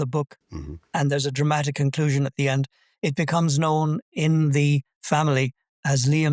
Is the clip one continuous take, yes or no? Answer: yes